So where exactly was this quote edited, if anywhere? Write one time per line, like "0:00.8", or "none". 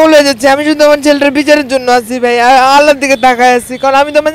none